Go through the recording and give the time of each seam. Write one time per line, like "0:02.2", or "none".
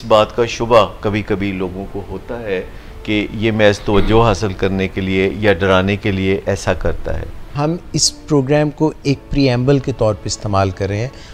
0:07.5